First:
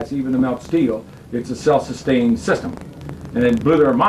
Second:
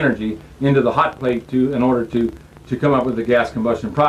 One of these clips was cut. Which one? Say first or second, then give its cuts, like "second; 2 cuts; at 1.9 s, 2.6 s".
second; 1 cut; at 2.6 s